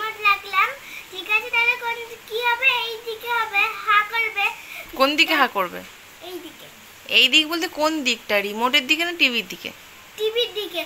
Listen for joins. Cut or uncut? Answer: uncut